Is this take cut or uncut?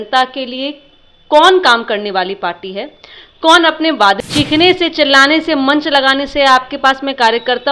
cut